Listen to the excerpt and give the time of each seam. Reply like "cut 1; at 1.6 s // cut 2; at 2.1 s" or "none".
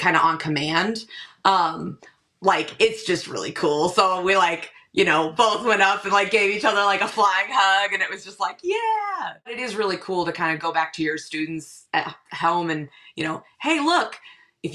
cut 1; at 9.6 s